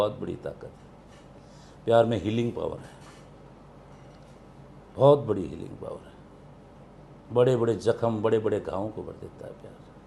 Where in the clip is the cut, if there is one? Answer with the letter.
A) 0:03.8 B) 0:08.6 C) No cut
C